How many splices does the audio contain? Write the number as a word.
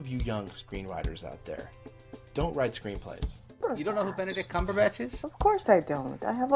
one